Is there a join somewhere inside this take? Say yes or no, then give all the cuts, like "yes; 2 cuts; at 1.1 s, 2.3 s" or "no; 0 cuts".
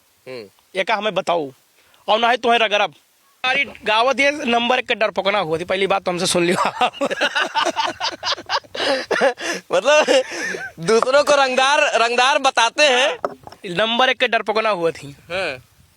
yes; 1 cut; at 3.4 s